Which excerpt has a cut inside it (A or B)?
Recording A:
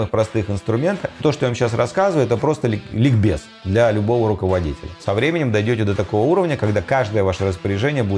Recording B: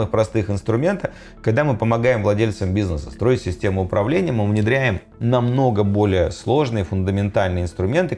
A